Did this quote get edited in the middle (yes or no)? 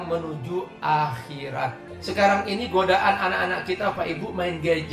yes